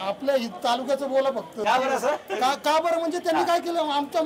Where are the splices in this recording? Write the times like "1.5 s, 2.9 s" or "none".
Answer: 1.6 s